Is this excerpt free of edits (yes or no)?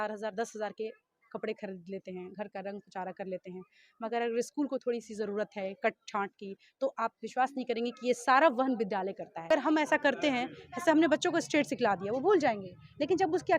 no